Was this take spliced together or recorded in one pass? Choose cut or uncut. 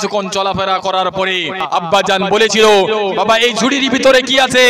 cut